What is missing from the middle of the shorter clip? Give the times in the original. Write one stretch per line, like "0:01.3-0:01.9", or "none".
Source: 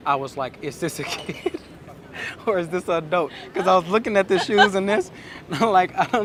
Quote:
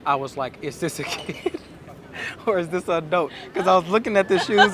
none